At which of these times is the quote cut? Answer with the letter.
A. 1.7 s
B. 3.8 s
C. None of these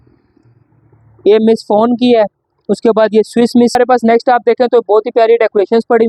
B